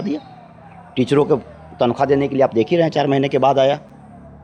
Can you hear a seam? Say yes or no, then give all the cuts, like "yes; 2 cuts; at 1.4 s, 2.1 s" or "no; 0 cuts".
no; 0 cuts